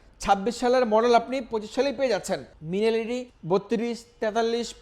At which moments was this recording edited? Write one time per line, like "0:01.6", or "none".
0:02.5
0:03.3

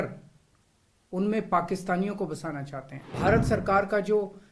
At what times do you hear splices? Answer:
0:03.0

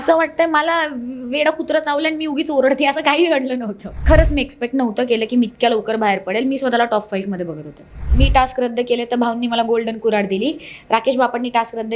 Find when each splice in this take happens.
0:04.0
0:08.0

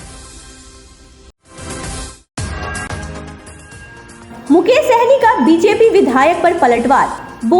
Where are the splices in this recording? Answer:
0:01.1

